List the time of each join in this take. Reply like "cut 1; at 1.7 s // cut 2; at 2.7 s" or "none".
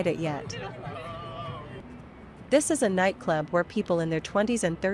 cut 1; at 1.8 s